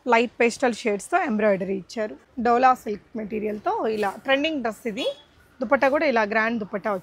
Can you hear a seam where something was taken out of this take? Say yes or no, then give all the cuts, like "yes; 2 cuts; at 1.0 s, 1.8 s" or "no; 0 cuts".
yes; 1 cut; at 2.2 s